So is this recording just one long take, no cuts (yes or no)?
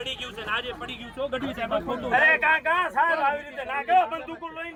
yes